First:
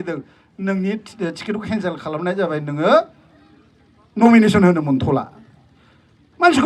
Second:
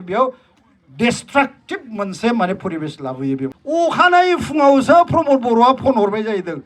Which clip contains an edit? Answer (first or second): second